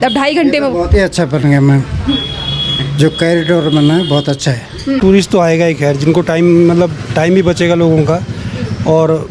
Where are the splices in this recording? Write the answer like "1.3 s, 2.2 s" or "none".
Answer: 5.0 s